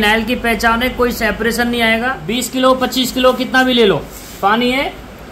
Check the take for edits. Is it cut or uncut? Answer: cut